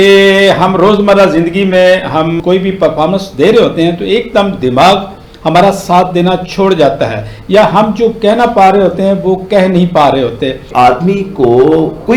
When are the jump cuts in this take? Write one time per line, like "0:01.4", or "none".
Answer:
0:10.7